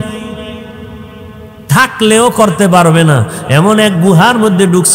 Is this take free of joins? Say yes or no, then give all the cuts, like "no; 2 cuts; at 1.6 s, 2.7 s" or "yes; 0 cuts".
yes; 0 cuts